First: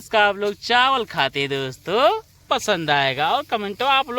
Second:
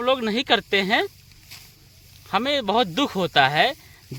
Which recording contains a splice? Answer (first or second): first